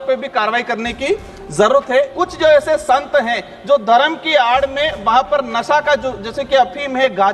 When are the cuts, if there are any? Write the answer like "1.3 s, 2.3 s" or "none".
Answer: 2.1 s